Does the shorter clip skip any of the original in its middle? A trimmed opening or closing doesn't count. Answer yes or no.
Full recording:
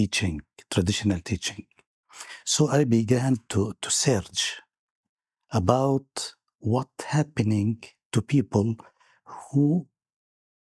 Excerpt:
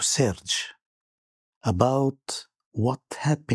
no